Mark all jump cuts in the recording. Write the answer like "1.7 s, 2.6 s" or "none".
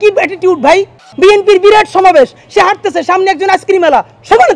1.0 s

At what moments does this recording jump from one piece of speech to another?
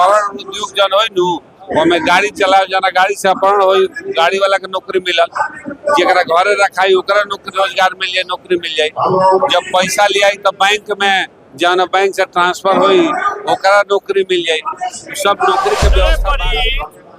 16.2 s

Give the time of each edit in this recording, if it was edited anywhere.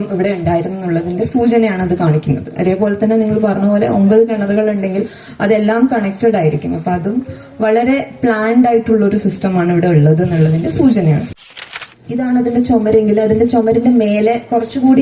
11.4 s

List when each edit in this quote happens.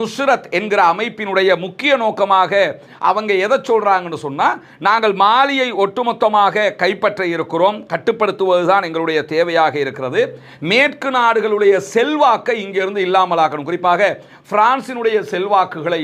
none

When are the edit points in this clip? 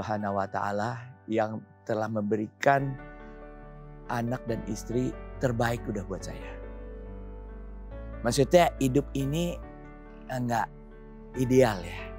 none

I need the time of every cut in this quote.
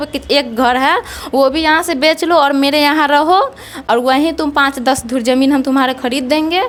none

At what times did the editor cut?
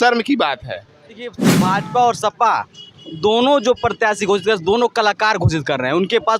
1.5 s

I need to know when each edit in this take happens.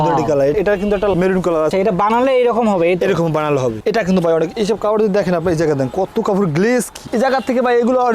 1.7 s, 3.8 s, 7.0 s

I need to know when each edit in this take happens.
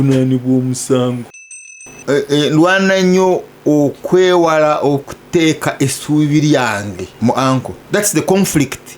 1.3 s, 7.1 s, 7.8 s

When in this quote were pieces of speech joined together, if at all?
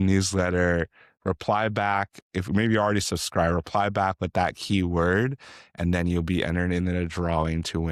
none

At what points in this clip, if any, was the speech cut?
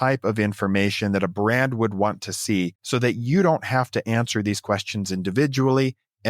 2.8 s

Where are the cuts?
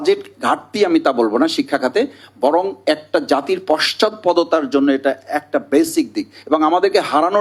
none

